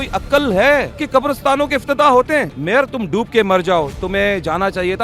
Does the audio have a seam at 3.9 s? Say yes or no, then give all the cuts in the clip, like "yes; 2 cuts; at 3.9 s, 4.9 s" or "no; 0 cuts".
no; 2 cuts; at 1.0 s, 2.6 s